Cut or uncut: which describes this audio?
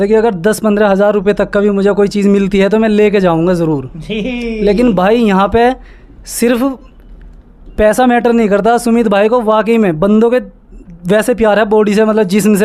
uncut